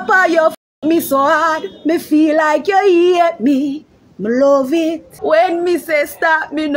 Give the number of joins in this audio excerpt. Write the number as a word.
one